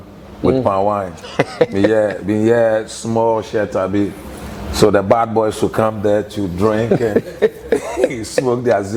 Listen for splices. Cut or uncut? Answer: uncut